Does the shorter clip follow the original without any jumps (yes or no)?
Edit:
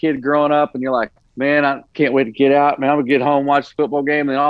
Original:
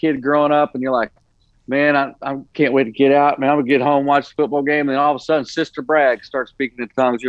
no